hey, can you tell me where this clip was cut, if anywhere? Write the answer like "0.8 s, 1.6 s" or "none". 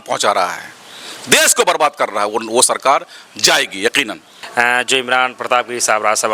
4.4 s